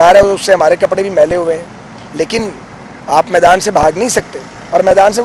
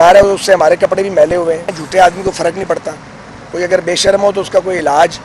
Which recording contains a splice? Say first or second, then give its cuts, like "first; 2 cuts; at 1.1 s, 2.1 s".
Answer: second; 1 cut; at 1.8 s